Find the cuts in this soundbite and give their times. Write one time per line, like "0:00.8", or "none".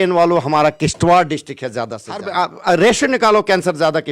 0:02.3